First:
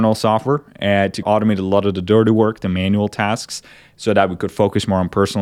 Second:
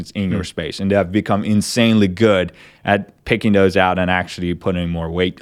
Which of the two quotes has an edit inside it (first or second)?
first